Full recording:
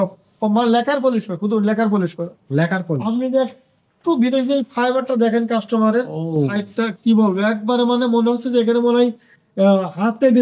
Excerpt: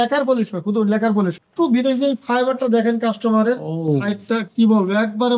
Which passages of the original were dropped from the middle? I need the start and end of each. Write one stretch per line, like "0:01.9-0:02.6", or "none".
0:02.2-0:03.9